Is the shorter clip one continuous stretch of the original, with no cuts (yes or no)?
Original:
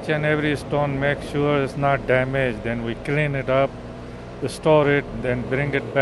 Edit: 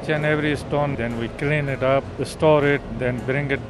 no